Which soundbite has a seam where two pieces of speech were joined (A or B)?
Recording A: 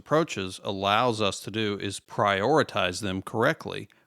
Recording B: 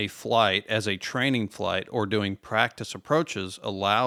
A